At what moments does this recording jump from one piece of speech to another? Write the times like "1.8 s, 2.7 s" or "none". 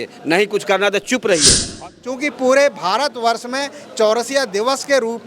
1.8 s